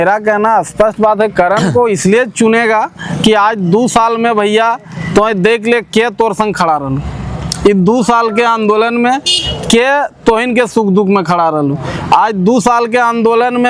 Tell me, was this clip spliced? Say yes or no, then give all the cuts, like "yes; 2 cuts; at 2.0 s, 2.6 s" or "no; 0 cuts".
no; 0 cuts